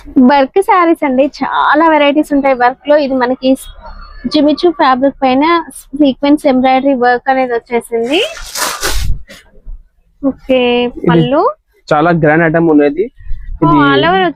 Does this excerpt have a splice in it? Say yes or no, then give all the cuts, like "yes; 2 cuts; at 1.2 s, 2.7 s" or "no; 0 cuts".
no; 0 cuts